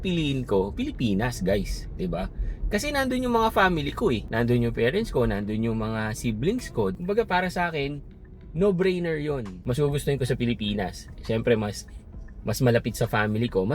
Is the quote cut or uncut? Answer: cut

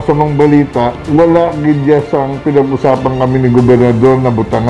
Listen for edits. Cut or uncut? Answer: cut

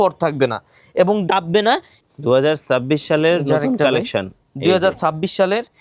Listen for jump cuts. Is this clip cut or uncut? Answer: cut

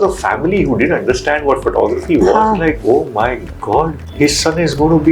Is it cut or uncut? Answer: cut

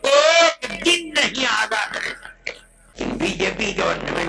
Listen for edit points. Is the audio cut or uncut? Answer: cut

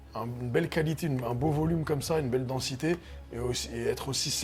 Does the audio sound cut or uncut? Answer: uncut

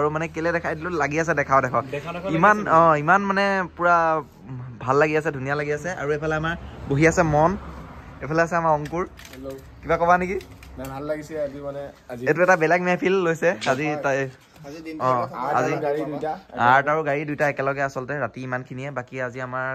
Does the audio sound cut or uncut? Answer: uncut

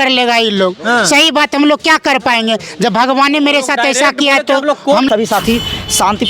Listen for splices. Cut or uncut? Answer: cut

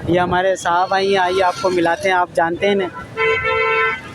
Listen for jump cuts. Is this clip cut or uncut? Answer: uncut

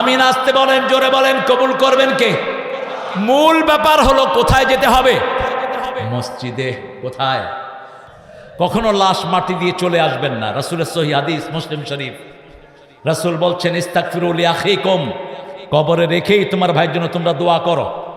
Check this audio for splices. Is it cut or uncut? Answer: cut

